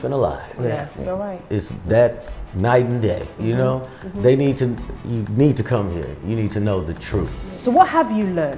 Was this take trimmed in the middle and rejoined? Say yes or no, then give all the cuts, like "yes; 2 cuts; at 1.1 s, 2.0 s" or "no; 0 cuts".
yes; 1 cut; at 7.5 s